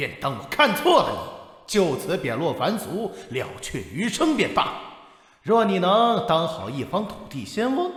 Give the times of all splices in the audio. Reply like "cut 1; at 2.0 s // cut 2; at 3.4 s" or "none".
none